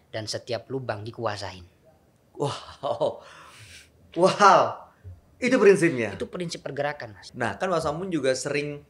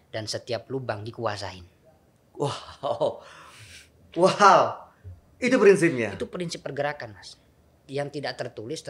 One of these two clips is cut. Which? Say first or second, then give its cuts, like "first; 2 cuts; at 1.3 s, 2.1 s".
first; 1 cut; at 7.3 s